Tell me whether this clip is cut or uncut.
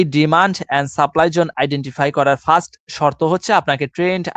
uncut